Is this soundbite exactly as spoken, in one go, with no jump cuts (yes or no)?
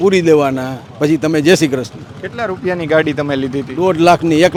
yes